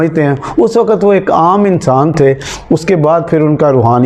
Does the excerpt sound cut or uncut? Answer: uncut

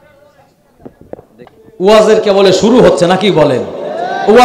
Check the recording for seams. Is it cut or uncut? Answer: cut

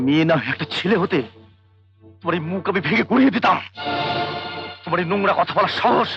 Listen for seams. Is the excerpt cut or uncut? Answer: uncut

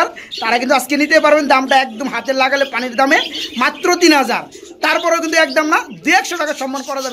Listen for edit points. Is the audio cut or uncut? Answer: uncut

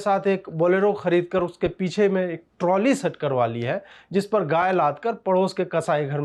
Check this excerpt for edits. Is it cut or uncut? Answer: uncut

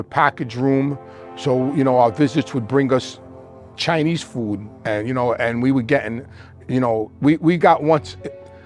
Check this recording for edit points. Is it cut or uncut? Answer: uncut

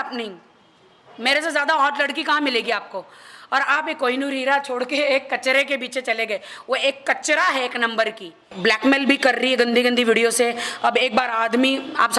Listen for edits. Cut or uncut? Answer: cut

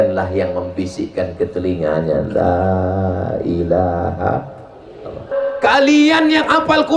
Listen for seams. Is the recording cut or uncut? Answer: cut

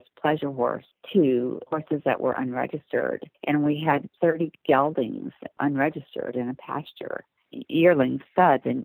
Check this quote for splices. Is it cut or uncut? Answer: cut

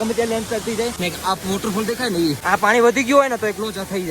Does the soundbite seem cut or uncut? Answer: cut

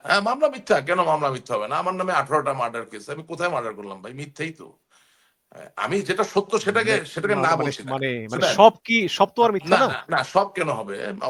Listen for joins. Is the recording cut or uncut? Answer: uncut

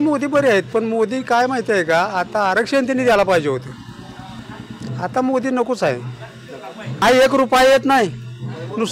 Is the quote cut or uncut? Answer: cut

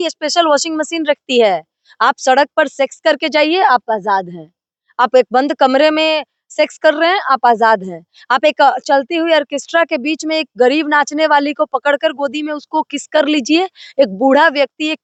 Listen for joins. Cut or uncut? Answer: uncut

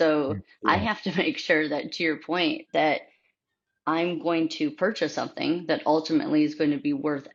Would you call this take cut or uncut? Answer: uncut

